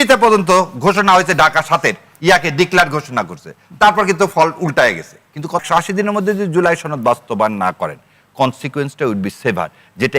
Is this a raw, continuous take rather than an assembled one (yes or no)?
no